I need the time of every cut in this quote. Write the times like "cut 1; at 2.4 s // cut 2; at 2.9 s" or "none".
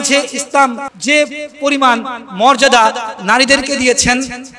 cut 1; at 0.9 s